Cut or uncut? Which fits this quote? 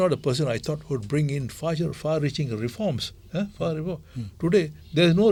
uncut